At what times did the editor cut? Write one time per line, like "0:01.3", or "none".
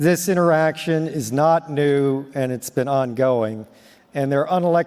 none